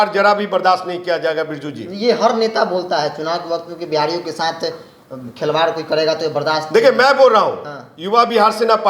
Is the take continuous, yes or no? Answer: yes